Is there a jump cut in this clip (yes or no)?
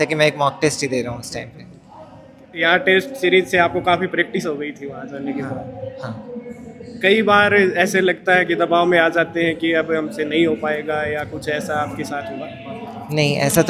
no